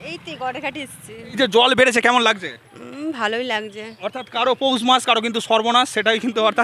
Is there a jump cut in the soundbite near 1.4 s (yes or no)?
yes